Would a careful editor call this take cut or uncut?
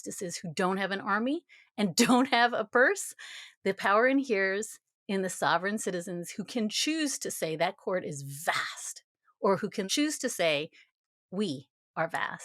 cut